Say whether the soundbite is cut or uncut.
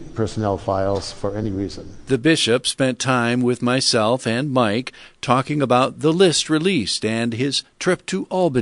uncut